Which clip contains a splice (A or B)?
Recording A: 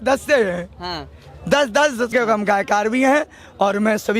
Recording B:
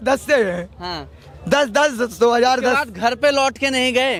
A